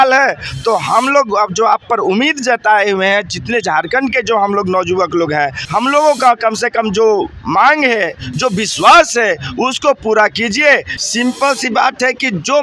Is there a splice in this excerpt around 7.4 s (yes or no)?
no